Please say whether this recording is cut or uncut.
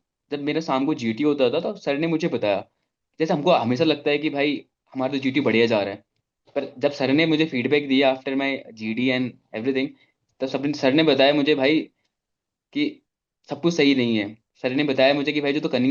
uncut